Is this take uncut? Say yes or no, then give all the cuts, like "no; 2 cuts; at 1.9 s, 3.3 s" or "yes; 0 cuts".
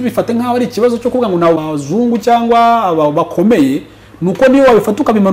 no; 1 cut; at 1.6 s